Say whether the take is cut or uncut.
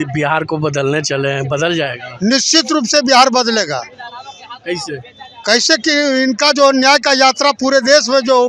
uncut